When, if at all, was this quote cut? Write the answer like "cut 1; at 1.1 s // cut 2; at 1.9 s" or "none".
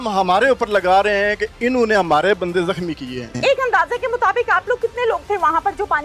cut 1; at 3.3 s